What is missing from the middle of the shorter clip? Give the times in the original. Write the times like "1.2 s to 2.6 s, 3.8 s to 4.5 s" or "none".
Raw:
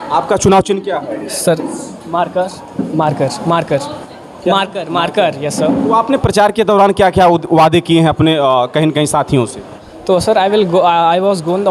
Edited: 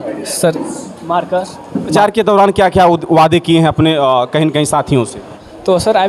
3.0 s to 6.4 s